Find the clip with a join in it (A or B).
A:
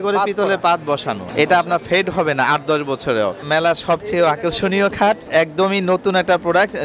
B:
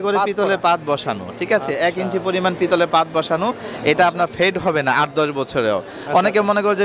A